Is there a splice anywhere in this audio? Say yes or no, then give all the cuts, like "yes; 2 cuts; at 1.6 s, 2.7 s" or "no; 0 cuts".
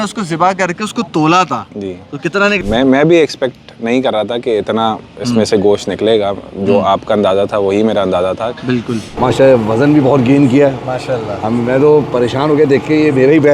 yes; 2 cuts; at 2.6 s, 9.1 s